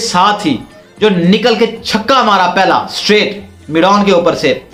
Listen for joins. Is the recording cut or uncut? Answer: uncut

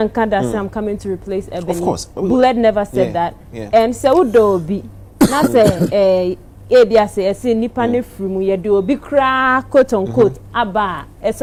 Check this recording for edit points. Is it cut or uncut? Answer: uncut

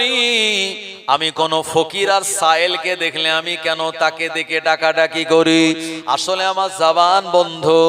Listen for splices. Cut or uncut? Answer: uncut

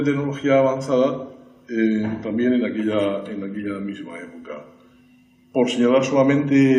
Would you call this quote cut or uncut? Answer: uncut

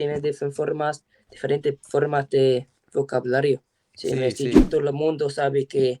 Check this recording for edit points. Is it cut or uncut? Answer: cut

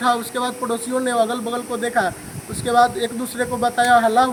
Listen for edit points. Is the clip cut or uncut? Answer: uncut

